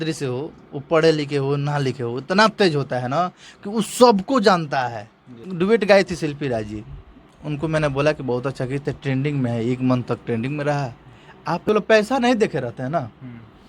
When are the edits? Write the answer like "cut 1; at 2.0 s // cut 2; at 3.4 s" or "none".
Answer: cut 1; at 5.4 s // cut 2; at 11.6 s